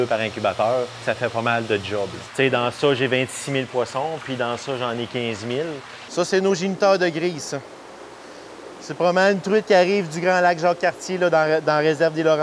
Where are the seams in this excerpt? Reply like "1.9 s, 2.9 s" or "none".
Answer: 1.0 s, 2.2 s, 6.0 s